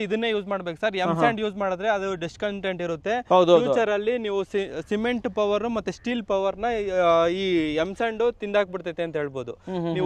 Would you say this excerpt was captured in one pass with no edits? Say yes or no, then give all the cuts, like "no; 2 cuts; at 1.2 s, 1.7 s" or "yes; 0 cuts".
yes; 0 cuts